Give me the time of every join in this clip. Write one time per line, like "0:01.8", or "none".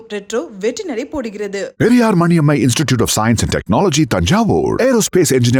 none